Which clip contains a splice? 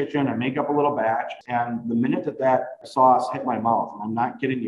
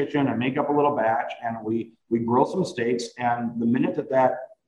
first; 2 cuts; at 1.4 s, 2.8 s

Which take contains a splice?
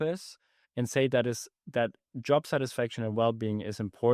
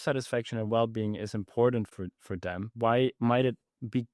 second; 1 cut; at 2.8 s

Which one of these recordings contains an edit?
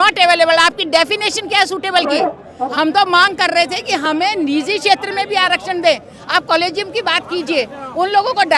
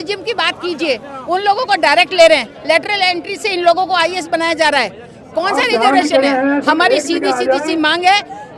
first; 1 cut; at 2.5 s

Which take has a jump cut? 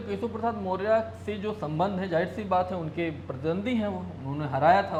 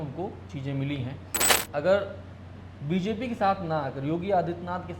second; 1 cut; at 1.6 s

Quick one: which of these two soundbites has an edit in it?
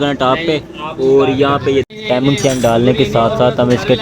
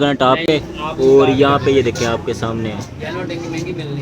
first; 1 cut; at 1.9 s

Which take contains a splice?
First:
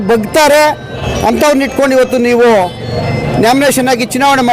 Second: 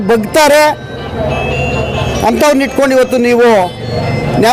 first; 1 cut; at 1.0 s

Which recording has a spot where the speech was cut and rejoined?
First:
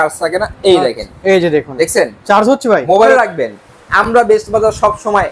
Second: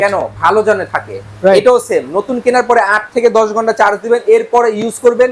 first; 1 cut; at 3.1 s

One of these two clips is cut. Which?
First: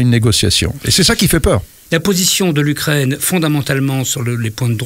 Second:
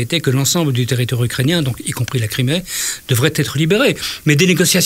first; 1 cut; at 1.7 s

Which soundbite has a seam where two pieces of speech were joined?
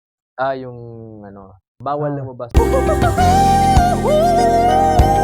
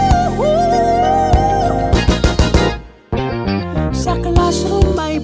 first; 1 cut; at 2.4 s

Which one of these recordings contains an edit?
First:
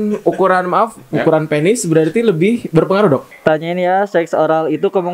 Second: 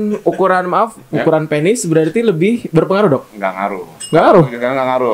first; 1 cut; at 3.3 s

